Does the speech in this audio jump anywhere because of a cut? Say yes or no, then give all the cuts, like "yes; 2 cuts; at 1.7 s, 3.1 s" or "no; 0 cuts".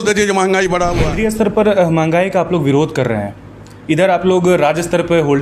yes; 1 cut; at 1.0 s